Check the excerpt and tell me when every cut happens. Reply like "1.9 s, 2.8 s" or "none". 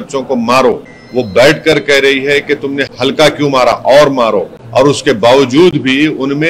0.9 s, 2.9 s, 4.6 s